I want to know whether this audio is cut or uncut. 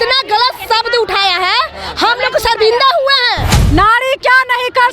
cut